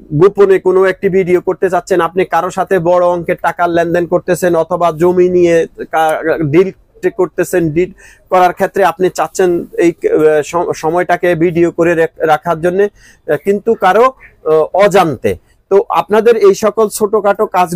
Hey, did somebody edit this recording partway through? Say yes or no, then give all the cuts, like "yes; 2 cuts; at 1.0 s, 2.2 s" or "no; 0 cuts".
no; 0 cuts